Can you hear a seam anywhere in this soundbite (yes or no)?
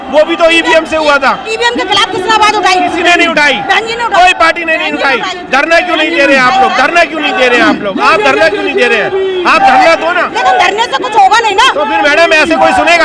no